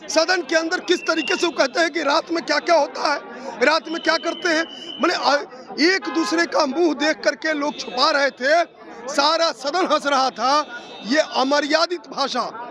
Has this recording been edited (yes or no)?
no